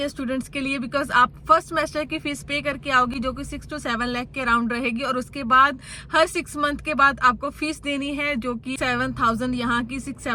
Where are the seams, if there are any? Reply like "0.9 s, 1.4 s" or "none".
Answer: none